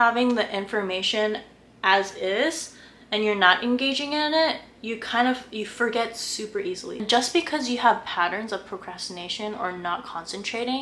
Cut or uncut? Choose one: cut